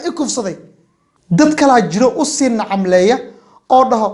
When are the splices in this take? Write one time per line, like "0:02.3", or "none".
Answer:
0:01.2